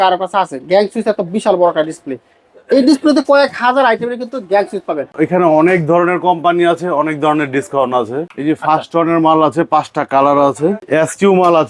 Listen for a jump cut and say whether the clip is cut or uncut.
cut